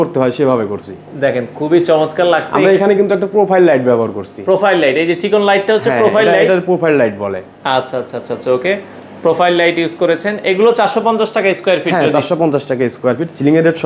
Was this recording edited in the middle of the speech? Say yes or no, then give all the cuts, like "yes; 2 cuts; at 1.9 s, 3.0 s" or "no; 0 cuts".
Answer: no; 0 cuts